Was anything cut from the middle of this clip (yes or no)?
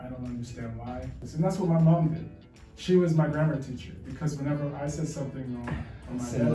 yes